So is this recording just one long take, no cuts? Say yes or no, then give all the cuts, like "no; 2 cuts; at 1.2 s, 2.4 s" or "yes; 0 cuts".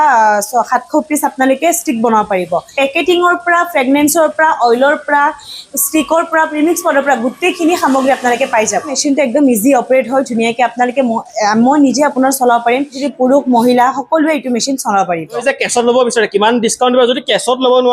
no; 4 cuts; at 2.7 s, 9.0 s, 13.0 s, 15.4 s